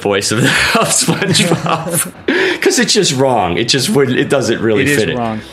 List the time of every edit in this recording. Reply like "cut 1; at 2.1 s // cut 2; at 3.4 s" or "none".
cut 1; at 2.1 s